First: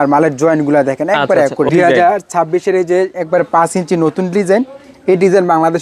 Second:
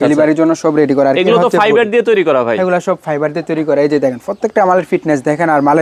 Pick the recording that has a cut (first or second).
first